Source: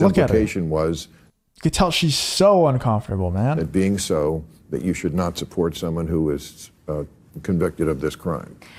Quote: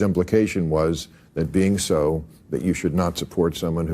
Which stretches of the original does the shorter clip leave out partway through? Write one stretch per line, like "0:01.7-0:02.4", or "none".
0:01.4-0:03.6